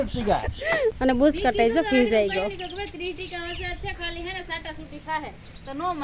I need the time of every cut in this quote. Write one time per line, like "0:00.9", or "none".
0:01.0